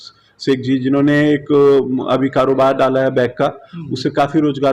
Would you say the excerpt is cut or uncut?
uncut